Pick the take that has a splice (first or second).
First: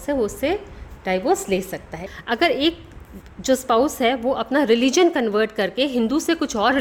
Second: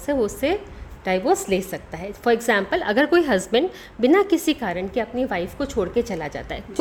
first